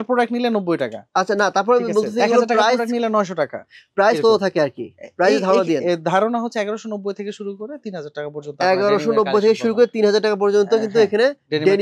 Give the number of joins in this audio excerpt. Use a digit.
0